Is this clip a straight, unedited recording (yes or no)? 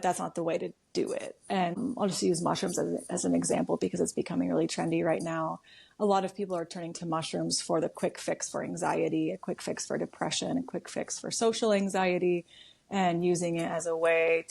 no